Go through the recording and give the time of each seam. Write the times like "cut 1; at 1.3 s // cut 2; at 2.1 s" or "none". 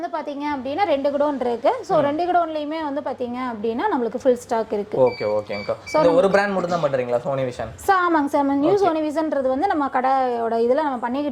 none